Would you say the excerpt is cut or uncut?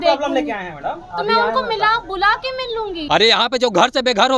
cut